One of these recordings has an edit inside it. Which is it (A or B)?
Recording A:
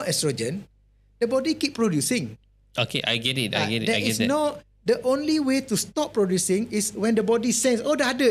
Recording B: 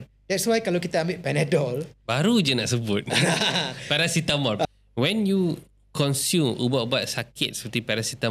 B